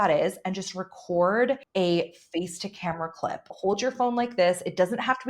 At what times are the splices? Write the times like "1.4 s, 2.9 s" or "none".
1.7 s, 3.5 s